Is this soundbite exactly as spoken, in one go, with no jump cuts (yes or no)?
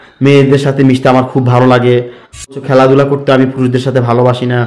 no